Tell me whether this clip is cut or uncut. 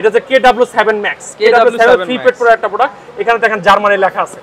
uncut